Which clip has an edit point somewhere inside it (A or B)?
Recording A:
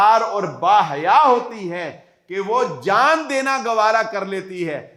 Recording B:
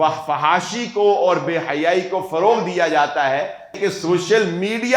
B